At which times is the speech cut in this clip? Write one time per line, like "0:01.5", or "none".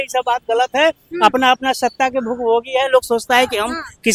none